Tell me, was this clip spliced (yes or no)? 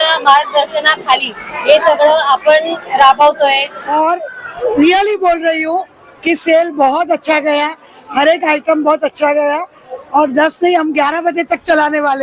yes